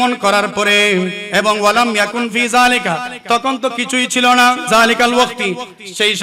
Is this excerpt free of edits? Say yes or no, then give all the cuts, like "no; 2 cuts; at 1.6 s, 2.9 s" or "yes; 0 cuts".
no; 2 cuts; at 1.2 s, 4.7 s